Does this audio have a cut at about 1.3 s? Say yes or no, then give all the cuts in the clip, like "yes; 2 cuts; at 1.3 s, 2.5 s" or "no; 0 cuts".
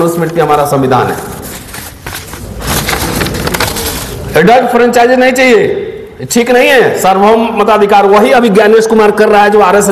no; 0 cuts